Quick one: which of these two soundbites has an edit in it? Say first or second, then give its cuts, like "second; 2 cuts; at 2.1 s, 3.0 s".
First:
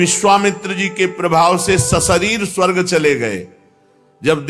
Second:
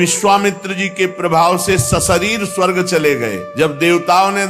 second; 1 cut; at 3.4 s